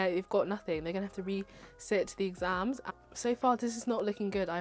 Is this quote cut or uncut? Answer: cut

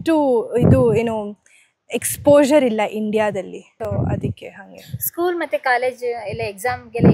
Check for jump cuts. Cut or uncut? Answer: uncut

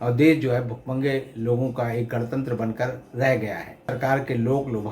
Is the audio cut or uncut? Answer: cut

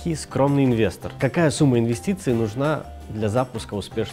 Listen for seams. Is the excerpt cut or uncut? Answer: cut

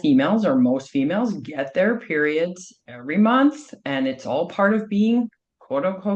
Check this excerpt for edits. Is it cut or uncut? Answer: uncut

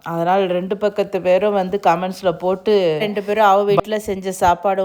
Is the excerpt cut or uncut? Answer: cut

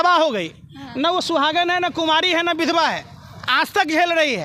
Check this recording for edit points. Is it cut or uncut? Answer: uncut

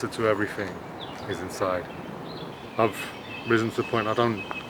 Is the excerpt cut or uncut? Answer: cut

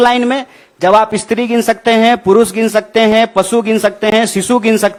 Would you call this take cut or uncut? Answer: uncut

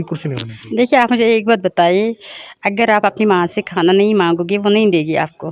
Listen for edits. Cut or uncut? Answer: uncut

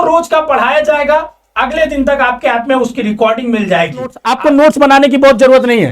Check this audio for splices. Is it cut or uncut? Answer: cut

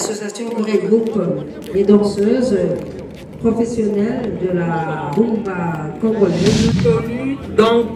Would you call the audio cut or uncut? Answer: cut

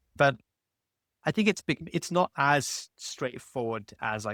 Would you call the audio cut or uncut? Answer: uncut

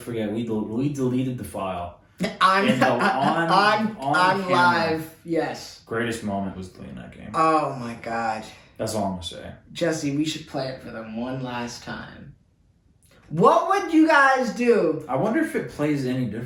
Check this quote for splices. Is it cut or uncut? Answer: uncut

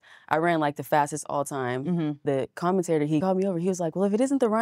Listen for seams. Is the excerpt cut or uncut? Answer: cut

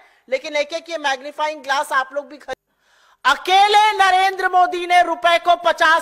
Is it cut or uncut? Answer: cut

